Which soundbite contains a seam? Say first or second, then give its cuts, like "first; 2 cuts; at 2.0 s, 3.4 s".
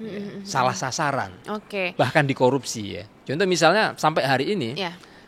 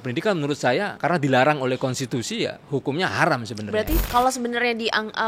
second; 2 cuts; at 0.9 s, 4.0 s